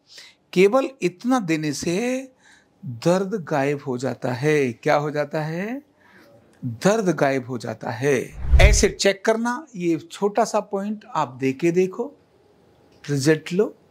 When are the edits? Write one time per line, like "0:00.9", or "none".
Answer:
0:08.5